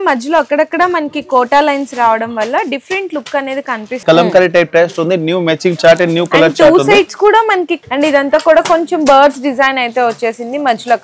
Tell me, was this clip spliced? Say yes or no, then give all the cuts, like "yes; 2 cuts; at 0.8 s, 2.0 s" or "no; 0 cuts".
yes; 2 cuts; at 4.0 s, 7.8 s